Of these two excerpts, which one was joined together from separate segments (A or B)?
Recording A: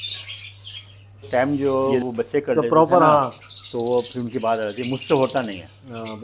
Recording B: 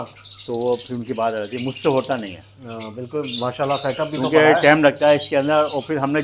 A